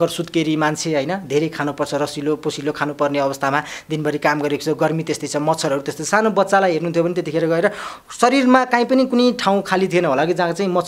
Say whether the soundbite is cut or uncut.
uncut